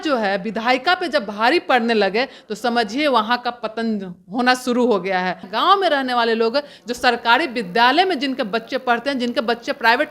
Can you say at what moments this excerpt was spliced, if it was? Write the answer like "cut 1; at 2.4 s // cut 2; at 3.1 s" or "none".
cut 1; at 5.5 s